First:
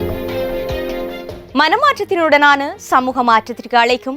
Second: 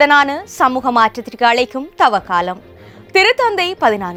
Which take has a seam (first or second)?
first